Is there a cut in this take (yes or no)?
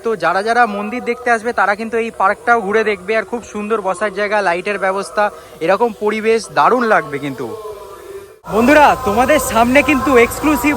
yes